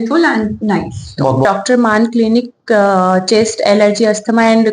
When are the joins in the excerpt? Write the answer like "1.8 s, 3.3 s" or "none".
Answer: 1.4 s